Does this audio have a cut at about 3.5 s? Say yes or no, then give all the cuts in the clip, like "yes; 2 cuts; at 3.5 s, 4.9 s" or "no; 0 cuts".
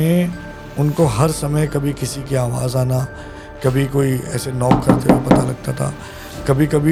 no; 0 cuts